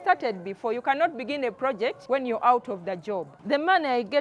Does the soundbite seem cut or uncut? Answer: cut